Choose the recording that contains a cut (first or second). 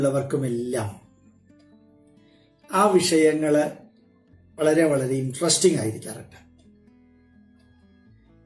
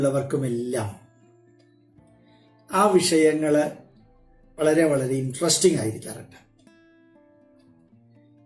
first